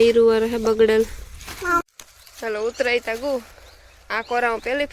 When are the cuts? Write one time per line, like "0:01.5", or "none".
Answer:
0:01.8